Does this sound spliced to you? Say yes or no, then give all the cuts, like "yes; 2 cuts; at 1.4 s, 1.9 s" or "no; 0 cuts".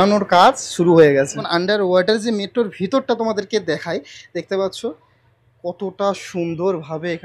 yes; 1 cut; at 1.5 s